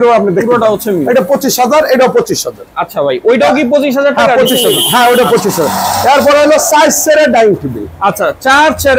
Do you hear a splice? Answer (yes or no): no